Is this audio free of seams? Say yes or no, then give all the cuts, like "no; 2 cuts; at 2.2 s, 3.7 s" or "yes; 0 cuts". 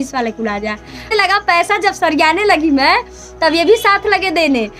no; 1 cut; at 1.1 s